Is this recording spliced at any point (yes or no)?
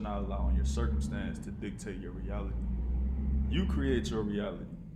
no